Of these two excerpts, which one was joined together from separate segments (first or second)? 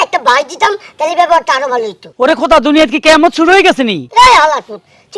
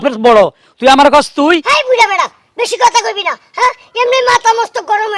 first